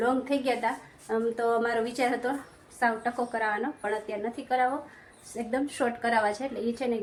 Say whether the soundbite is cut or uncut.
uncut